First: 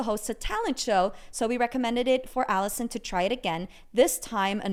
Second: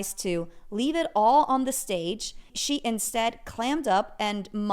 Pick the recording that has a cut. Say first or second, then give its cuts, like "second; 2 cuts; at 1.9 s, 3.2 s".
second; 1 cut; at 2.5 s